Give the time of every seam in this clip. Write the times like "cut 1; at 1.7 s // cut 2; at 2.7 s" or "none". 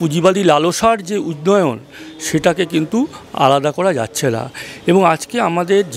none